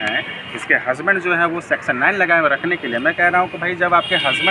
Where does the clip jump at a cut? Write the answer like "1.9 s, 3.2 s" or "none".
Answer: none